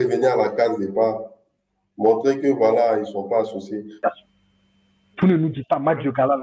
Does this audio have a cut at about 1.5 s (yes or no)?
no